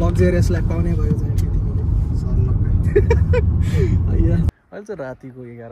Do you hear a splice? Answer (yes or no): yes